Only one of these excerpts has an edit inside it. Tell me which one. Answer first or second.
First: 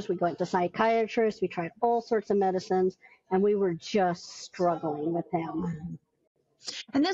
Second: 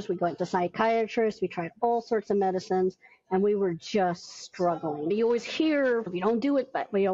second